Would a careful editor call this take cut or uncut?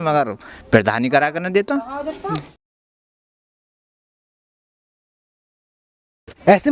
uncut